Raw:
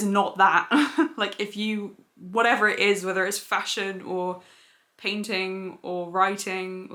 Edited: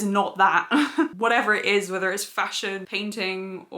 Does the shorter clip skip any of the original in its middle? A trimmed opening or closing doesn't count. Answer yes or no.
yes